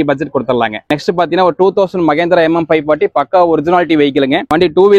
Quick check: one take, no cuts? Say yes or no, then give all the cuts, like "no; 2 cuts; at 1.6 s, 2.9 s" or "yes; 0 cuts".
yes; 0 cuts